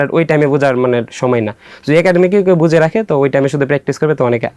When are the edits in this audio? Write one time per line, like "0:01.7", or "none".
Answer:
none